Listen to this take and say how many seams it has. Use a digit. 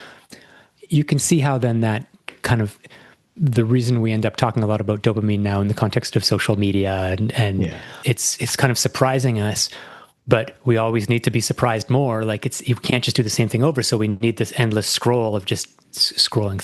1